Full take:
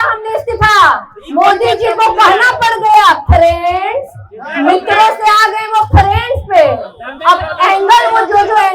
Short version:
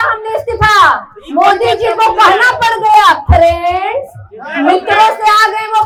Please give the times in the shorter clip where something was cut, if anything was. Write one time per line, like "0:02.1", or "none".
none